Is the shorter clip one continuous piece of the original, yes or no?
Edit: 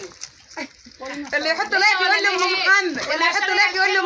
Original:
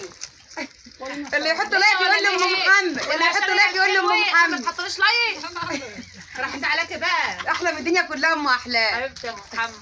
yes